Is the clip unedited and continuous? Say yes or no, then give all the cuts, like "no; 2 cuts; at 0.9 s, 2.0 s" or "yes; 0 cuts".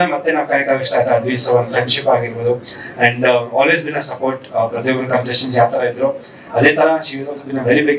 yes; 0 cuts